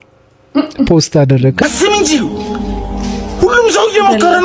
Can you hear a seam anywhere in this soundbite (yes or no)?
yes